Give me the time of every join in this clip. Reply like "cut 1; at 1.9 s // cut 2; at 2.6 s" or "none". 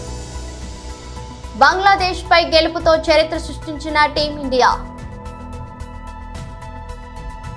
none